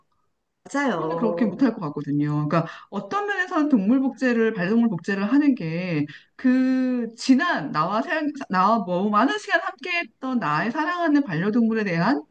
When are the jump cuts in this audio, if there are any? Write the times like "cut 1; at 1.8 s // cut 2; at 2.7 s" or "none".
none